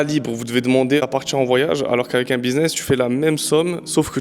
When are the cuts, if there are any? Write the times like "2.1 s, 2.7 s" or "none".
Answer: 1.0 s